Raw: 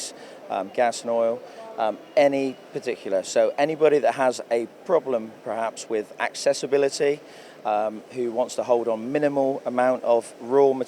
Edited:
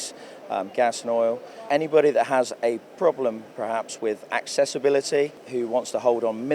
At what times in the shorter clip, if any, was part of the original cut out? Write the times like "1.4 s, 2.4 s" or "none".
1.7 s, 5.4 s